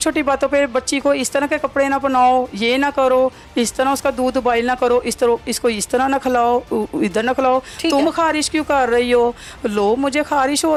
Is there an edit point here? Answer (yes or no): no